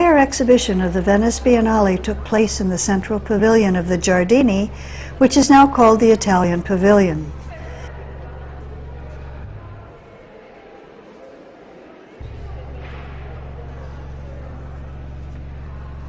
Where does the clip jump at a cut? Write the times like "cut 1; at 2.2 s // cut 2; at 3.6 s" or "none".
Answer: cut 1; at 3.2 s